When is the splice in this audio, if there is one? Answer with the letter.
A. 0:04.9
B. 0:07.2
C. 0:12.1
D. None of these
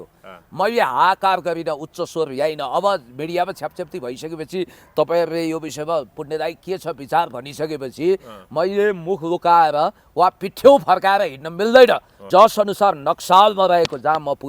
C